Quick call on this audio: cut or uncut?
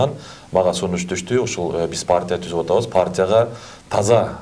uncut